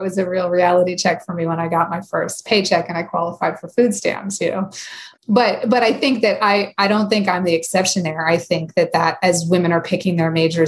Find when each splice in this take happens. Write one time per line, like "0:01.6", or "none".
0:05.0